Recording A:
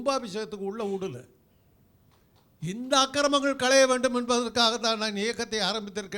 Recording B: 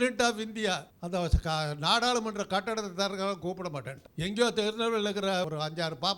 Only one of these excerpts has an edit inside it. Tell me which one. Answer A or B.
B